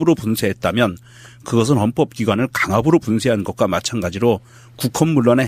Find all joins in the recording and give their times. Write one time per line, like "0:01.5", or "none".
0:03.0